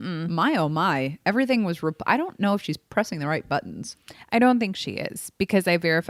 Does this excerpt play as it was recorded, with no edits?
yes; 0 cuts

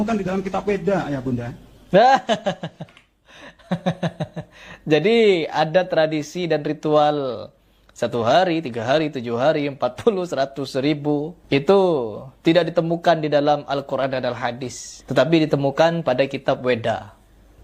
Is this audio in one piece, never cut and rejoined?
yes; 0 cuts

